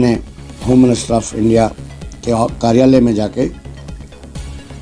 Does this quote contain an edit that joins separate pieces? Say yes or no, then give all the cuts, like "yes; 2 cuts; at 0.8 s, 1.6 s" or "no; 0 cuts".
yes; 1 cut; at 3.6 s